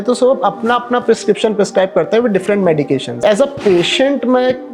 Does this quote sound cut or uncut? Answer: cut